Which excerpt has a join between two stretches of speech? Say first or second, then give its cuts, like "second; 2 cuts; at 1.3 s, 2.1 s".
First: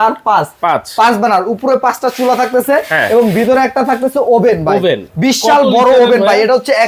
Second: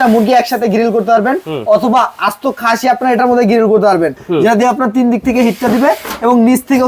second; 1 cut; at 4.2 s